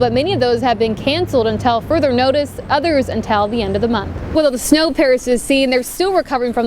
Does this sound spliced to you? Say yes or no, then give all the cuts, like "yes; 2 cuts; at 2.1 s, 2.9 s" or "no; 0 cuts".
yes; 1 cut; at 4.3 s